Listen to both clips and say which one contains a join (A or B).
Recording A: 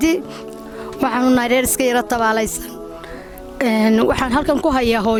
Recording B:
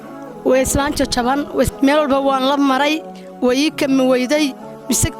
B